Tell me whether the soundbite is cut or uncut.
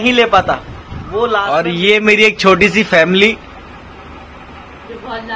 cut